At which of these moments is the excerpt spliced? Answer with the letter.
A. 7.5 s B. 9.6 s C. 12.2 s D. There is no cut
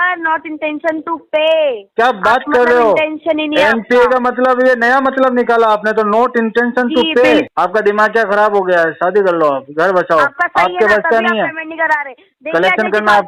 A